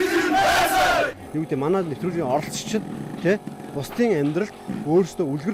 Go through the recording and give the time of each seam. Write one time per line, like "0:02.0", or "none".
0:01.2